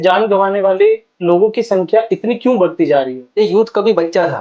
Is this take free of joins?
no; 1 cut; at 3.4 s

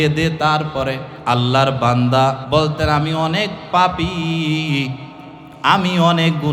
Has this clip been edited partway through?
yes; 2 cuts; at 1.1 s, 2.4 s

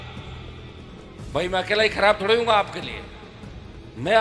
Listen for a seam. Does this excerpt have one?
no; 0 cuts

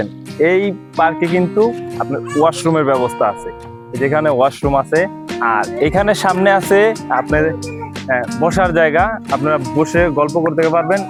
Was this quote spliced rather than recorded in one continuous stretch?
no; 0 cuts

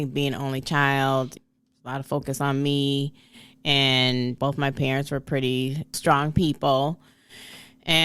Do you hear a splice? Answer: yes; 1 cut; at 1.4 s

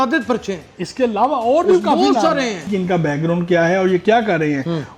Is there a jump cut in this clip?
yes; 1 cut; at 2.7 s

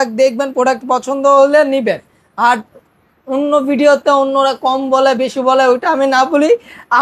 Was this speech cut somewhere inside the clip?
no; 0 cuts

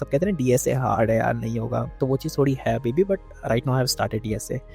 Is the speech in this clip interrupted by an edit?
yes; 1 cut; at 1.9 s

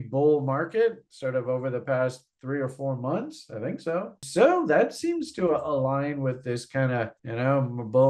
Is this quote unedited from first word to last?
yes; 0 cuts

